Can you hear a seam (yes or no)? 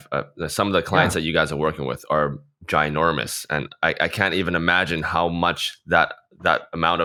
no